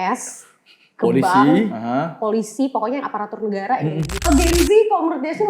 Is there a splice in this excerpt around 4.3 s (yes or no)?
yes